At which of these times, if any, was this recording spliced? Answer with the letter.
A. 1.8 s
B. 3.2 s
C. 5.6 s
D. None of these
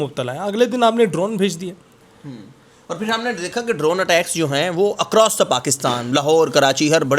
D